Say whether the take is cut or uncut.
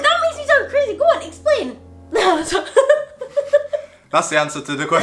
uncut